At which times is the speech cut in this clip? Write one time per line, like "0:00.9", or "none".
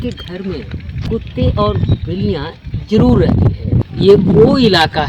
0:01.0
0:03.5